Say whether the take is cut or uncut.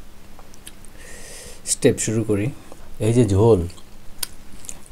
cut